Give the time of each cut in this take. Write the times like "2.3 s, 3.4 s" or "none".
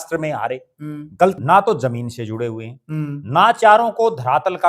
1.4 s